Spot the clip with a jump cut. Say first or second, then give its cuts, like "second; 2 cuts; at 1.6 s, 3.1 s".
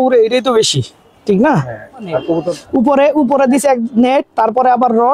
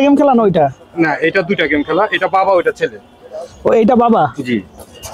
first; 1 cut; at 2.6 s